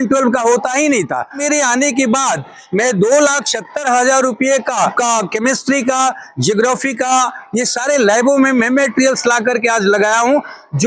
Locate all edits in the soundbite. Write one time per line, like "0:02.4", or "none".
0:01.4
0:04.9